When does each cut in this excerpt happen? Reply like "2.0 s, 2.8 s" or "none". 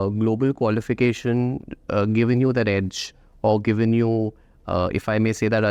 none